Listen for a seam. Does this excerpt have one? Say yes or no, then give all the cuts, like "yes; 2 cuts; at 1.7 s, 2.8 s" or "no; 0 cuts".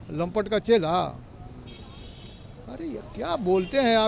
no; 0 cuts